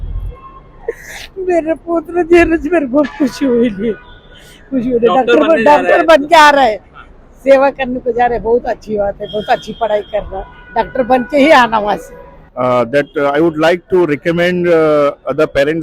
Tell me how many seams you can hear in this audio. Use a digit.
1